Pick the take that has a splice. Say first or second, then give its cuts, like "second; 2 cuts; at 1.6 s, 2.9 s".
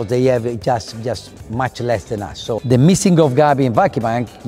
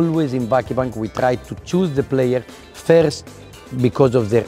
first; 1 cut; at 2.6 s